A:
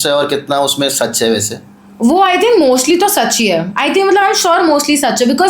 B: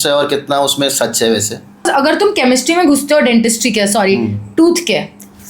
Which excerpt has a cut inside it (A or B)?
B